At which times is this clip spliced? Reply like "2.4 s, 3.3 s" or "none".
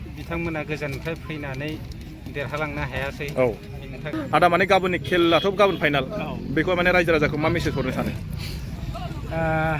4.1 s